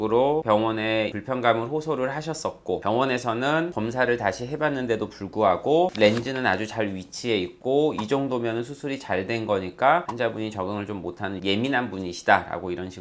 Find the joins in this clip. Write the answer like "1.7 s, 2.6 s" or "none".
none